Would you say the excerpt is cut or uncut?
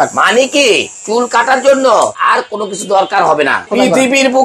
cut